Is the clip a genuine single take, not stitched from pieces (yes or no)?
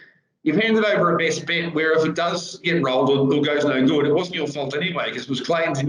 yes